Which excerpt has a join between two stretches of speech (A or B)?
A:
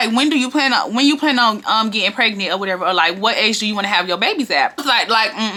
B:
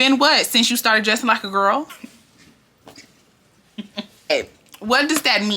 B